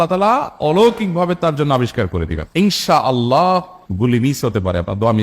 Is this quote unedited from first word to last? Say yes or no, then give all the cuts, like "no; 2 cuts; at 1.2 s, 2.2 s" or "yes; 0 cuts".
no; 1 cut; at 2.4 s